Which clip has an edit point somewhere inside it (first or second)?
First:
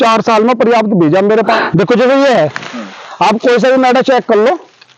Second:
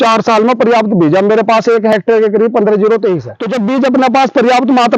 first